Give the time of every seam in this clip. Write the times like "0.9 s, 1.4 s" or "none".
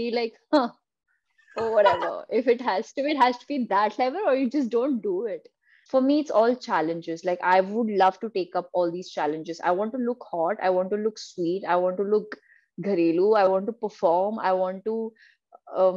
5.7 s